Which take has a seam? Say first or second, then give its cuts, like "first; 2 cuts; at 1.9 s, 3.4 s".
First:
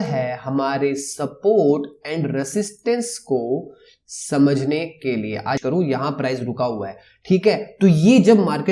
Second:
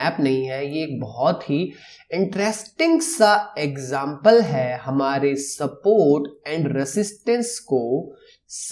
first; 1 cut; at 5.6 s